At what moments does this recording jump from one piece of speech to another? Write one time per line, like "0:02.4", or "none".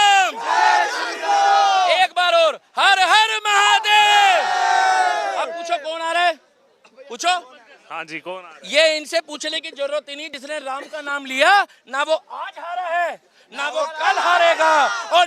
none